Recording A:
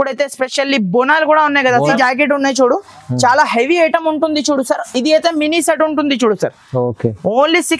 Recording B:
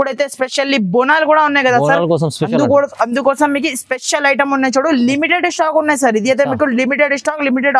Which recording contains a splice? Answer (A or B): A